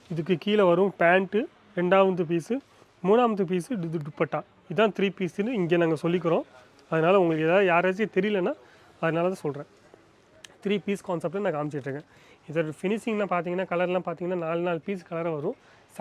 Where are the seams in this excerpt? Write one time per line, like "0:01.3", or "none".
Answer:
none